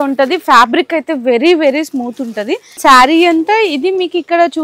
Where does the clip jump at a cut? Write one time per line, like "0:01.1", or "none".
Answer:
0:02.8